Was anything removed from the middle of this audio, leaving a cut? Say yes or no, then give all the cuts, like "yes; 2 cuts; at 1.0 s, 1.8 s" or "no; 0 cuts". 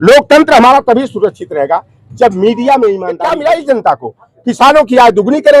yes; 1 cut; at 3.1 s